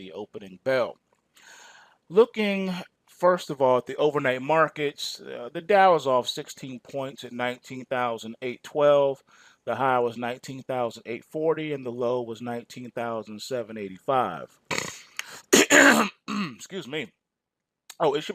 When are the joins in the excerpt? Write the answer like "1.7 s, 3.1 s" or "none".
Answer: 11.6 s